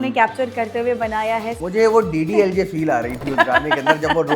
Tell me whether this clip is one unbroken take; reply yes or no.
no